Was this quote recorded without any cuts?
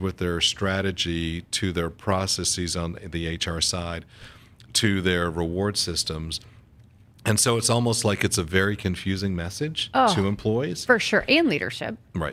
yes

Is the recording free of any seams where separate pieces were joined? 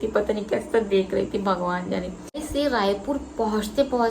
yes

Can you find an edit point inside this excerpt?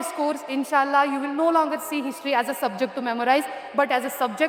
no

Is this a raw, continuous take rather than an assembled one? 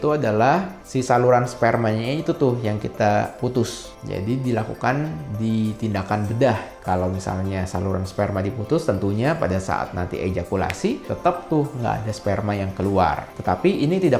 yes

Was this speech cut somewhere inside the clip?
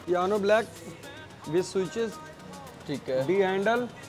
no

